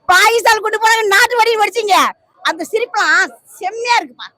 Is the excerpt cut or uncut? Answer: uncut